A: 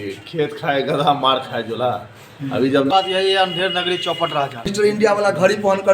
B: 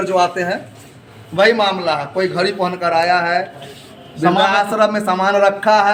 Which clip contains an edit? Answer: A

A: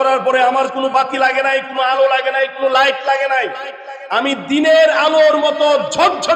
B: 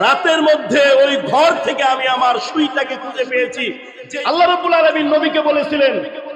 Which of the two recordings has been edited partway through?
B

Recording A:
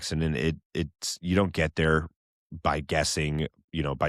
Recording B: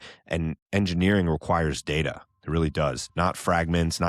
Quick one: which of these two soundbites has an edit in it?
B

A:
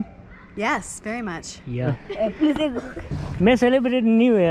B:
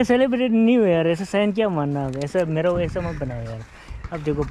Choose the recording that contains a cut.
A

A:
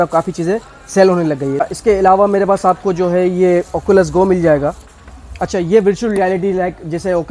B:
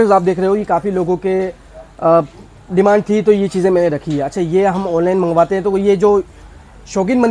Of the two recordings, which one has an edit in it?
A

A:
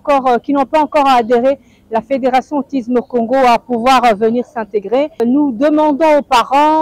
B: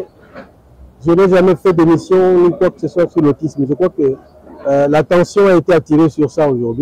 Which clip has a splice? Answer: A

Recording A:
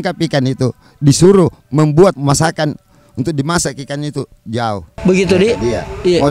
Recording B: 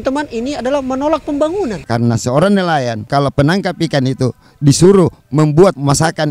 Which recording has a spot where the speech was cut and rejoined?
B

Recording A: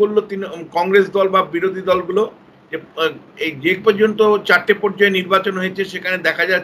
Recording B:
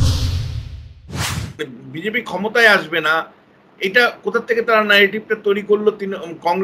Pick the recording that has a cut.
B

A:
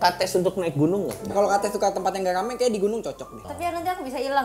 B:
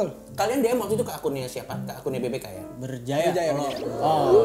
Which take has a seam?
A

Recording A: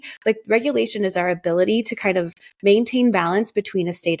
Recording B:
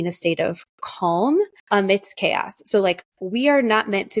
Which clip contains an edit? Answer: B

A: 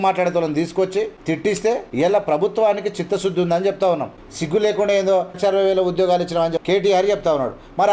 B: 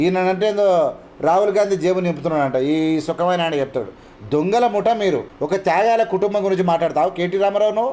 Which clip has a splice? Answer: A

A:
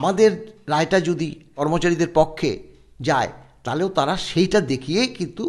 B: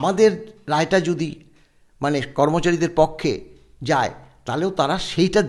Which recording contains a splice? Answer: A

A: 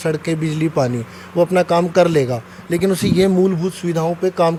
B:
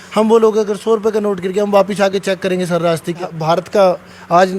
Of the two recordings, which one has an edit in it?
B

